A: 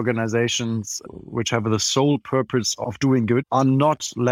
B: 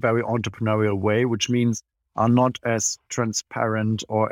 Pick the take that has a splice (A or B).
A